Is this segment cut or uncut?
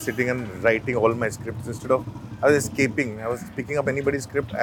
uncut